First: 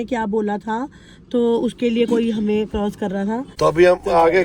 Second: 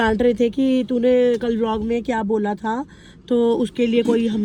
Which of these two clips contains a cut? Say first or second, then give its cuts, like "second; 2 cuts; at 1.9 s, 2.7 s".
first; 1 cut; at 3.5 s